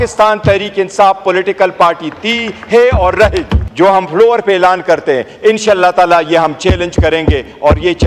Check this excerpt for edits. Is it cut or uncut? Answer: cut